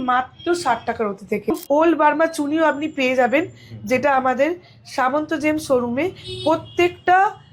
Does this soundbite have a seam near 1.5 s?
yes; 1 cut; at 1.5 s

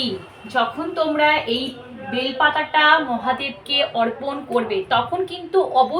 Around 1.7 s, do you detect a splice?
no; 0 cuts

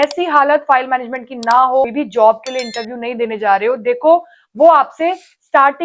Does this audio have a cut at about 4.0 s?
no; 1 cut; at 1.9 s

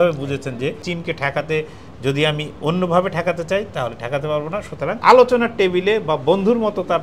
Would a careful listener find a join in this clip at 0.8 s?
yes; 2 cuts; at 0.8 s, 5.0 s

